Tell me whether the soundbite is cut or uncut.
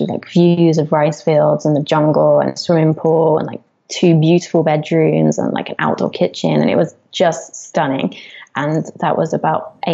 uncut